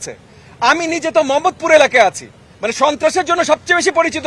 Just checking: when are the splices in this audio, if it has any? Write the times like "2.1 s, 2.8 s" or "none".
none